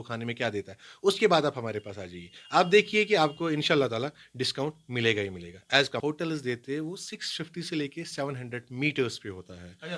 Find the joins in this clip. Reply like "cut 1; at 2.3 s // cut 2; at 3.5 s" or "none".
cut 1; at 6.0 s